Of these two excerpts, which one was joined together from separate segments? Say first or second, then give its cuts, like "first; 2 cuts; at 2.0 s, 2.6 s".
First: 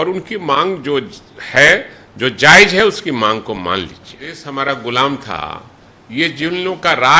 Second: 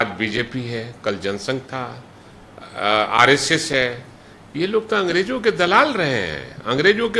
first; 1 cut; at 4.4 s